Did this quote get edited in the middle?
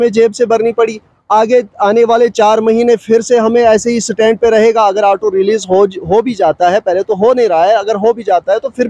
no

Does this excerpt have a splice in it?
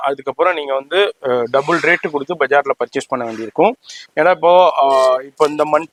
no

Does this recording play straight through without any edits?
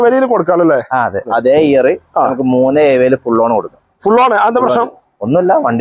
no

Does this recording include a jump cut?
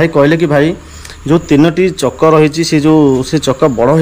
no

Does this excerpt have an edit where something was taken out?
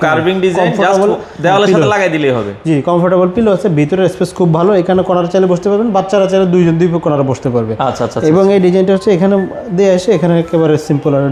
no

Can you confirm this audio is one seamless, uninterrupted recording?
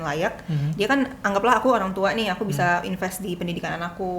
yes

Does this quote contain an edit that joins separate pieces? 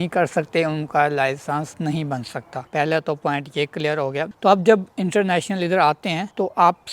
no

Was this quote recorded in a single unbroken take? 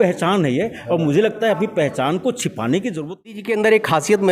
no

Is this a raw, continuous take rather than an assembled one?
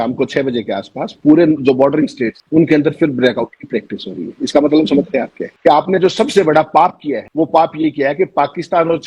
no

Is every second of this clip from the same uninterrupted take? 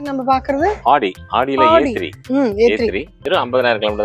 no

